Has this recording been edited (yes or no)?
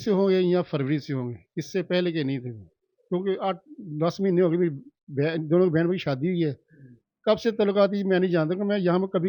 no